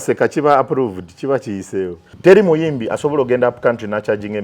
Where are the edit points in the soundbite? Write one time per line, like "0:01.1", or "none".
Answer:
0:02.0